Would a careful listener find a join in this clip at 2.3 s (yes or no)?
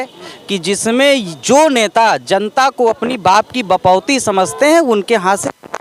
no